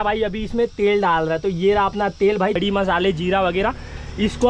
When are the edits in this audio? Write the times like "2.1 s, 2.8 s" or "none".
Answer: 2.6 s